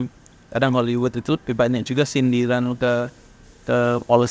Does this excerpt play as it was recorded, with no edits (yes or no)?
yes